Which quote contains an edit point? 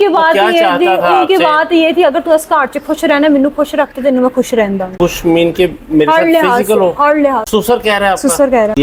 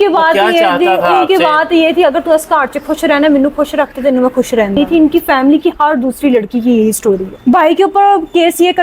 second; 2 cuts; at 4.8 s, 7.4 s

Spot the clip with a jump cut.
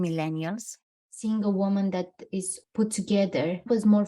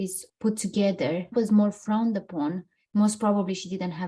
first; 1 cut; at 1.1 s

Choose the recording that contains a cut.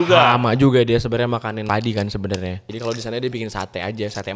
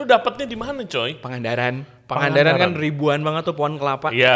first; 2 cuts; at 1.7 s, 2.6 s

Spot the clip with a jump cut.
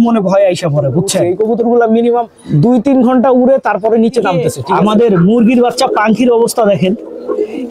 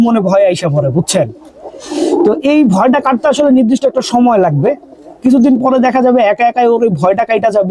first; 3 cuts; at 1.2 s, 2.4 s, 4.5 s

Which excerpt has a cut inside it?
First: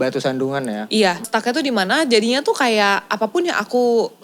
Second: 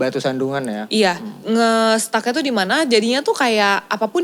first; 1 cut; at 1.3 s

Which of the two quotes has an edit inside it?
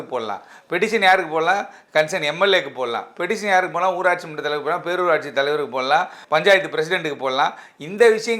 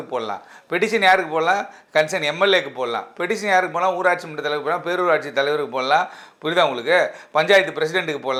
first; 1 cut; at 6.2 s

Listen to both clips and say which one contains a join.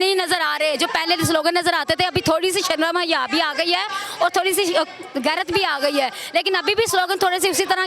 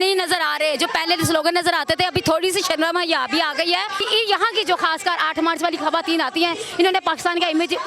second; 1 cut; at 4.1 s

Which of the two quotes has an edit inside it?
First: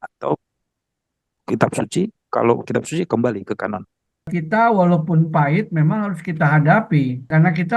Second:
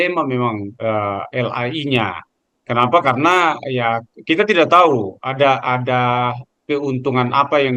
first; 1 cut; at 4.4 s

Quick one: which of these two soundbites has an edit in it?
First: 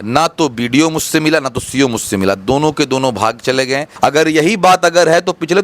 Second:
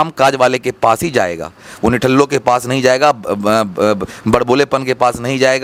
first; 1 cut; at 3.8 s

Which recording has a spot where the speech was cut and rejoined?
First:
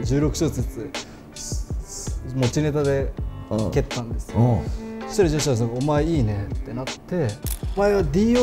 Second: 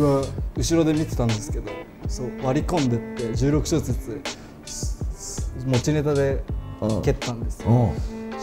first; 1 cut; at 7.5 s

